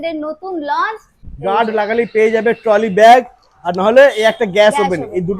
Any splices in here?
yes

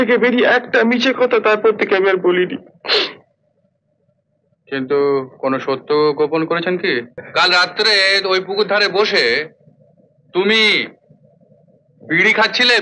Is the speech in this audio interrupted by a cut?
yes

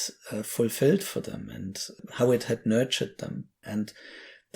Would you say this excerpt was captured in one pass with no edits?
no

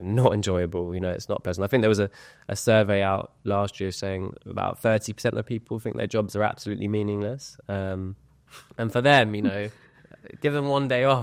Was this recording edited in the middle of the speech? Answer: no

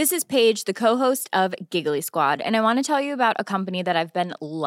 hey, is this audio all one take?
yes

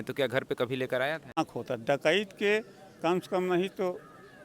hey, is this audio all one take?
no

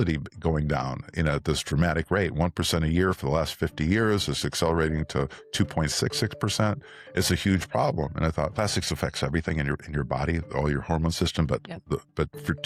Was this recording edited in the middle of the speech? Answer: no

